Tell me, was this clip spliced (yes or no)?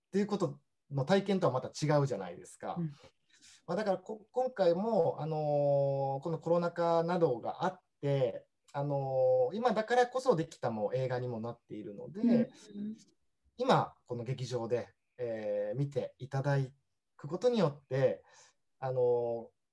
no